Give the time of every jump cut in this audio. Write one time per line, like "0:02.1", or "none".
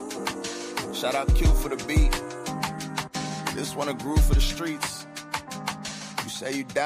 0:00.9

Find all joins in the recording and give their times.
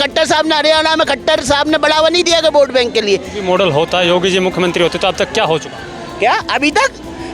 0:03.3

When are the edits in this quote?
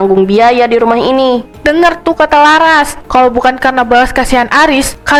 none

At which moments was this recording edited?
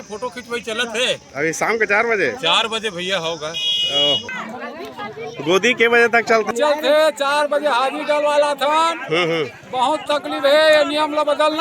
0:04.3
0:06.5

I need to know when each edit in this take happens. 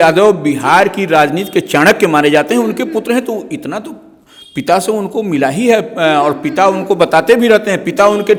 none

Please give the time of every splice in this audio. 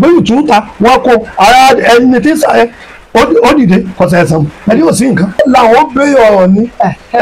0:05.4

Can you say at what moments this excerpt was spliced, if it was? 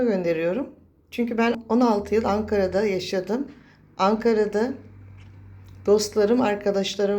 0:01.6

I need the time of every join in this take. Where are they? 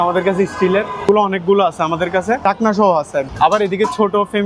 0:01.1
0:02.4
0:03.3

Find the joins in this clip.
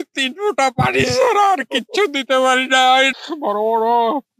0:03.1

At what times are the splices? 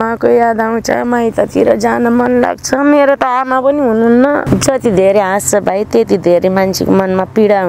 0:04.5

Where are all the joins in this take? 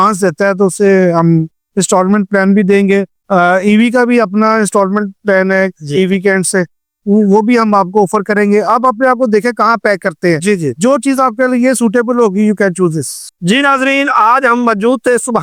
none

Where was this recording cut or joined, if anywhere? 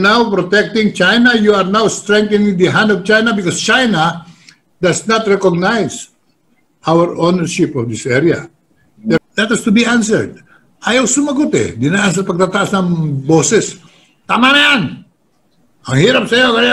0:09.2

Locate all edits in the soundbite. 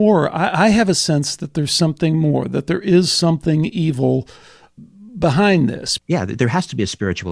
0:04.7
0:05.9

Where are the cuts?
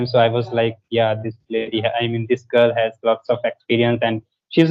none

